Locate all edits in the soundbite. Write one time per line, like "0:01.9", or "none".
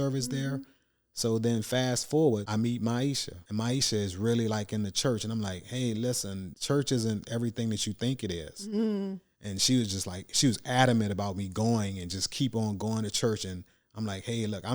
0:02.5
0:03.3
0:06.5